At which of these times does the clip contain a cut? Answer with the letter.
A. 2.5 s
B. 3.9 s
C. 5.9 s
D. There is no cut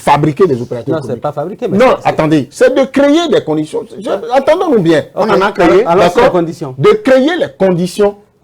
D